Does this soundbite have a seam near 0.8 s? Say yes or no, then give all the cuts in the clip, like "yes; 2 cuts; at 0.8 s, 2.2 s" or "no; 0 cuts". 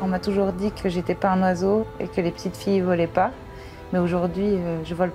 yes; 2 cuts; at 0.8 s, 1.8 s